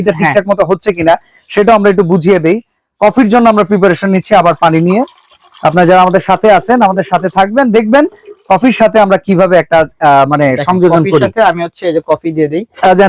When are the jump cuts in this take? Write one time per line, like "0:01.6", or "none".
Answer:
none